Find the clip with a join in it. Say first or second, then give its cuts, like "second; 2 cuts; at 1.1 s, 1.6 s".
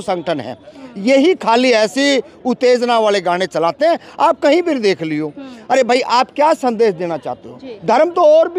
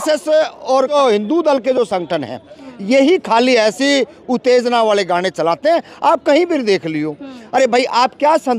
second; 1 cut; at 0.9 s